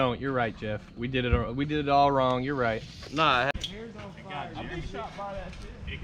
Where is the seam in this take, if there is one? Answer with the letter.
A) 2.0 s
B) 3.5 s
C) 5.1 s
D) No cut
B